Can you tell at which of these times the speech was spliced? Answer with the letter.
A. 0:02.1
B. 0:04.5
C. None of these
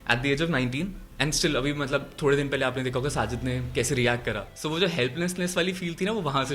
B